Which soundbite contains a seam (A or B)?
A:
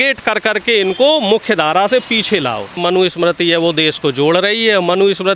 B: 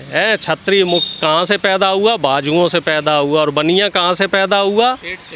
A